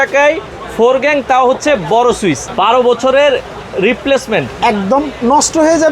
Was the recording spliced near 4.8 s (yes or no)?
no